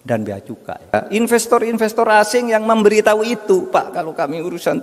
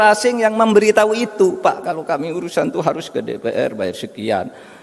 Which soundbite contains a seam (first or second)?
first